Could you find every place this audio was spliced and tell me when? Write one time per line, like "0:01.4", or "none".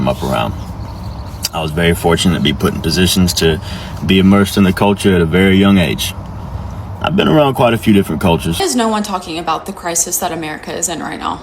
0:08.5